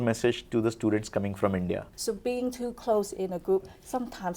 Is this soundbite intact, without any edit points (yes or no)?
no